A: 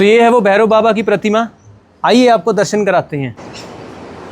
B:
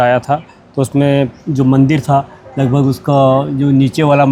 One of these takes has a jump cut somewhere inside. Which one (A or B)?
A